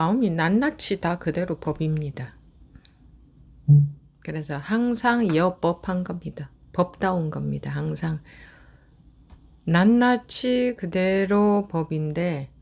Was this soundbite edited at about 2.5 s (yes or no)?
no